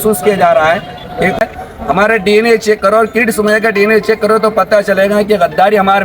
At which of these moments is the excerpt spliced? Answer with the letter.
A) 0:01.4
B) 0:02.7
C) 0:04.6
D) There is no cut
A